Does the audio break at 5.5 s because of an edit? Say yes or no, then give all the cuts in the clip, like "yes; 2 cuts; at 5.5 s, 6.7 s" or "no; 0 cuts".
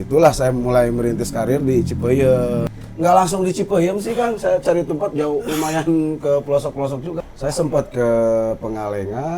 no; 2 cuts; at 2.7 s, 7.2 s